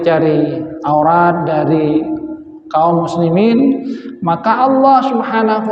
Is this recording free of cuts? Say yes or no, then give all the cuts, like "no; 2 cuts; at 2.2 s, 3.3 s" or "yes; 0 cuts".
yes; 0 cuts